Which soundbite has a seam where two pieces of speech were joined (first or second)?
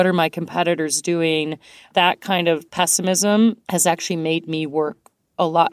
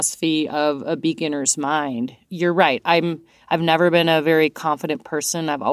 first